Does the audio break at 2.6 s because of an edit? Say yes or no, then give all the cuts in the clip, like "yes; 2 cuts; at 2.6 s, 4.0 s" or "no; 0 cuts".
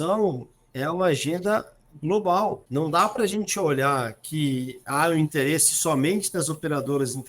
yes; 1 cut; at 2.6 s